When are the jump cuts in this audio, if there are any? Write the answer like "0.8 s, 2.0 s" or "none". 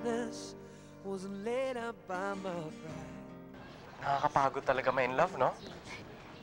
3.9 s